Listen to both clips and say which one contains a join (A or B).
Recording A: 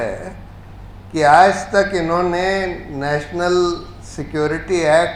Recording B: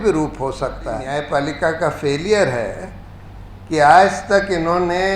B